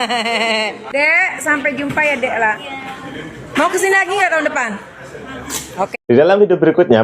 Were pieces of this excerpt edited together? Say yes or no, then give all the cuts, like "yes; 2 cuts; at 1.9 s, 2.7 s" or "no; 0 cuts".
no; 0 cuts